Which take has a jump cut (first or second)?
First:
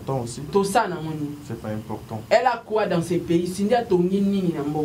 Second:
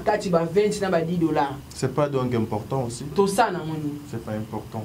second